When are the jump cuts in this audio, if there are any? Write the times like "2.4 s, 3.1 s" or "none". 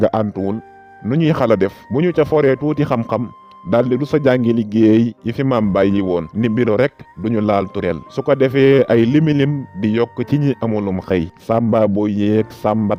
none